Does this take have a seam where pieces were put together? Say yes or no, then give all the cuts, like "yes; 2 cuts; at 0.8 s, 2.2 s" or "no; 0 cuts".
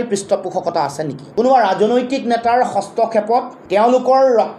yes; 2 cuts; at 1.2 s, 3.6 s